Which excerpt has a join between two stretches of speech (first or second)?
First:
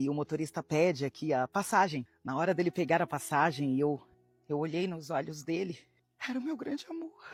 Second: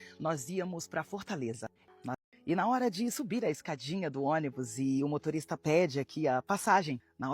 second